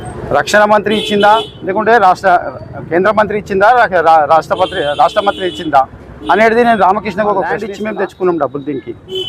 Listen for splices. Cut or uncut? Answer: cut